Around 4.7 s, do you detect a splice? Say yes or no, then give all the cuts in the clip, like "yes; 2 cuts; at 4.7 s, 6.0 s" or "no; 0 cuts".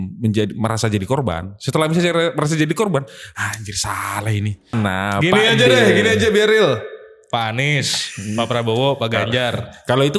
yes; 1 cut; at 4.7 s